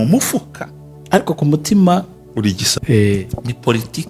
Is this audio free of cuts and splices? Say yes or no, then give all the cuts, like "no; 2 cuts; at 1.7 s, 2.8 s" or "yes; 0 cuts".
no; 1 cut; at 2.7 s